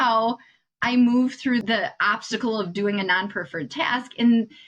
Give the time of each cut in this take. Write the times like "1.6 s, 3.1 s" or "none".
1.6 s